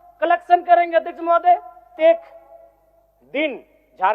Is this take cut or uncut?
cut